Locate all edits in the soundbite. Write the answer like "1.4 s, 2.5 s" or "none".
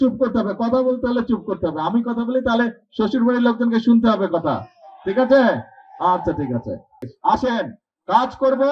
7.1 s